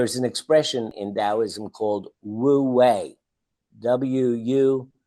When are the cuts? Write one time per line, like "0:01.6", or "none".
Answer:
0:00.9